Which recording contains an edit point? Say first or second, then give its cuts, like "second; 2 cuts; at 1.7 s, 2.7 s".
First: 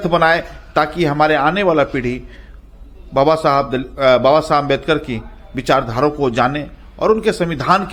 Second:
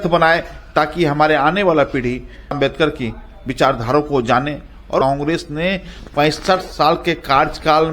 second; 2 cuts; at 2.5 s, 5.0 s